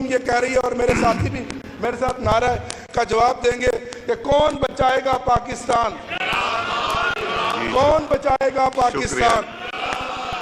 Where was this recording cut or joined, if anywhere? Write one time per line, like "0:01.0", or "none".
none